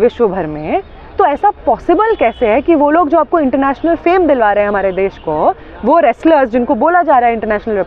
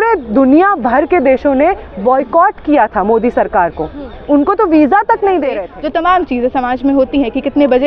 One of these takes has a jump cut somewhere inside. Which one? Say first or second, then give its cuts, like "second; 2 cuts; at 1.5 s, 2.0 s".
second; 1 cut; at 5.7 s